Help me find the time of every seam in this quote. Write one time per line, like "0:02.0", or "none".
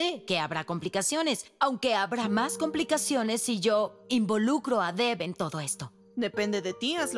none